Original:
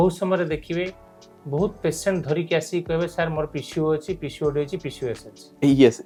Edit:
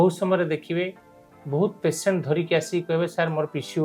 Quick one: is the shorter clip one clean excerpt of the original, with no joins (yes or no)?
yes